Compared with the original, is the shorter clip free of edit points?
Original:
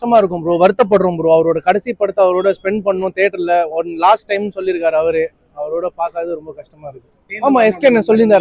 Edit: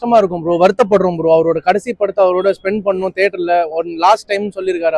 yes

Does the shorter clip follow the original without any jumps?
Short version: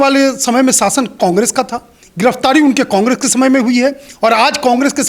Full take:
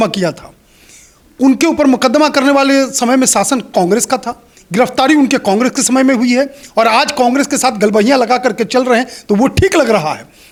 yes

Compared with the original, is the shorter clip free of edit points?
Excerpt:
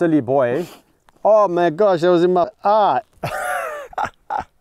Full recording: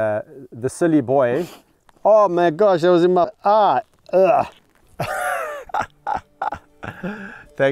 no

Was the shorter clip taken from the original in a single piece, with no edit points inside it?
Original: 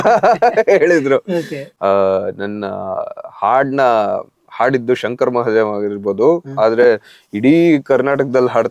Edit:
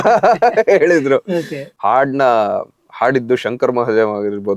no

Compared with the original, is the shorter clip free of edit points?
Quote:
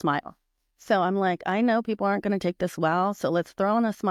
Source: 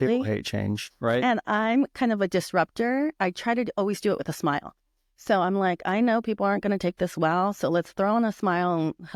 yes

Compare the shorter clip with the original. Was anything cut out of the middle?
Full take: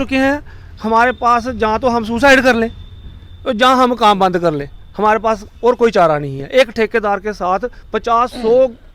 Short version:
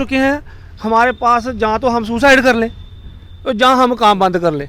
no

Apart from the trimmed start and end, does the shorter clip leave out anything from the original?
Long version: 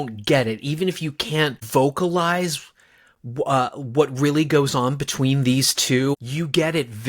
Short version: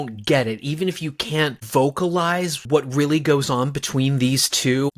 yes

